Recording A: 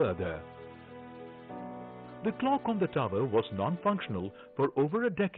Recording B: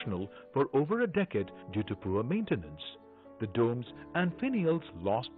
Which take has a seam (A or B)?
A